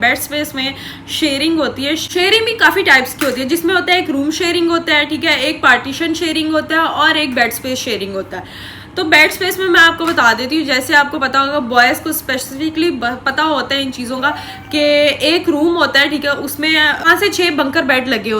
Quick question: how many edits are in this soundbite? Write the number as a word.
zero